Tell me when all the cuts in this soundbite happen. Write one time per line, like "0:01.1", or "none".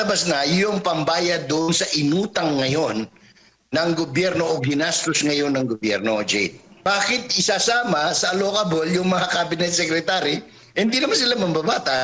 0:06.7